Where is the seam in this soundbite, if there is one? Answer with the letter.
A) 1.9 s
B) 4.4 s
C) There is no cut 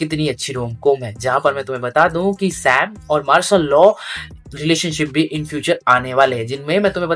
C